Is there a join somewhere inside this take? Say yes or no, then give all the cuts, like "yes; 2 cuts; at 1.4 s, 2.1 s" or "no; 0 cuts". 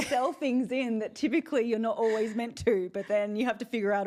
no; 0 cuts